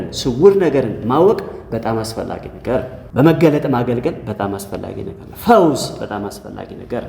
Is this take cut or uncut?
cut